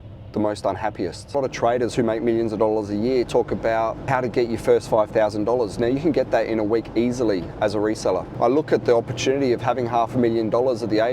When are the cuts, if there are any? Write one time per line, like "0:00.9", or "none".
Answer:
0:01.2
0:08.3